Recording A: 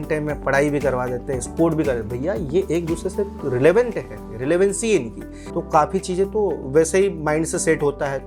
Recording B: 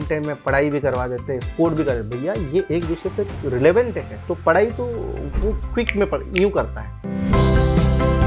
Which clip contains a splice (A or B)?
B